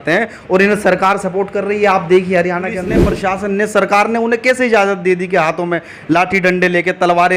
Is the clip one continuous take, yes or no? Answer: no